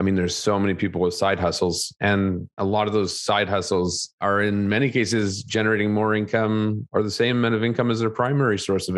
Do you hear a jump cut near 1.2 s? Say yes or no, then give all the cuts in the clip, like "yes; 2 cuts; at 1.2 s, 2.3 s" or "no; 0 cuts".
no; 1 cut; at 4.1 s